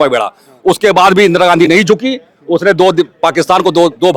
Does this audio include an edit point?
no; 0 cuts

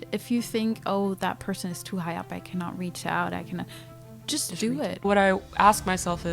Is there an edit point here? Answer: yes; 1 cut; at 5.1 s

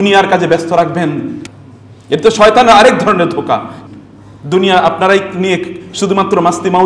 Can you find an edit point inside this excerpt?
yes; 2 cuts; at 1.4 s, 3.7 s

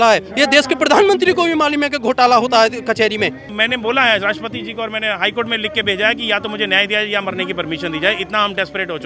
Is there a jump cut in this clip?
yes; 1 cut; at 3.5 s

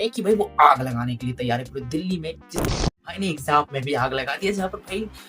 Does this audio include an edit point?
yes; 1 cut; at 2.9 s

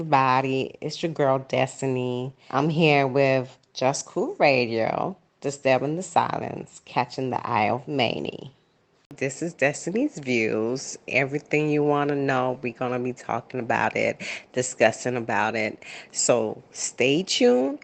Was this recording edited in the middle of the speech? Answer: yes; 2 cuts; at 2.3 s, 9.1 s

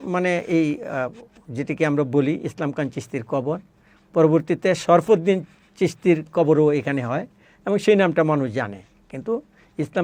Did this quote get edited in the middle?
no; 0 cuts

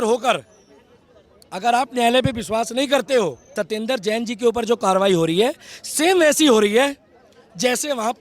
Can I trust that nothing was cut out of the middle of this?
no; 1 cut; at 3.4 s

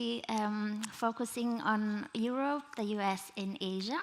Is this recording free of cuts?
yes; 0 cuts

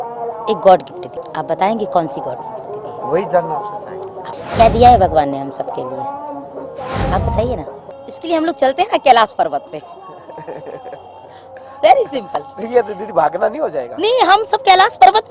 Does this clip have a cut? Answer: yes; 3 cuts; at 1.1 s, 4.3 s, 7.9 s

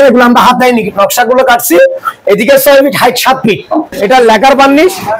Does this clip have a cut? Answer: yes; 1 cut; at 3.9 s

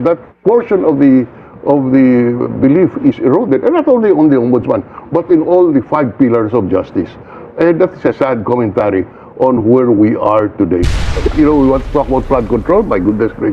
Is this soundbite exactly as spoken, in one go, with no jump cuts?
no; 1 cut; at 11.0 s

